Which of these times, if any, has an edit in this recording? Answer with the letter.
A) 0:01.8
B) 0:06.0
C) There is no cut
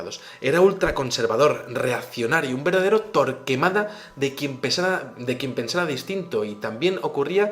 B